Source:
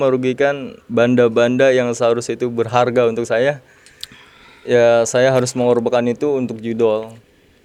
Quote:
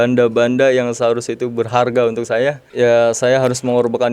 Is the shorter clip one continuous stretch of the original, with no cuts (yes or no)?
no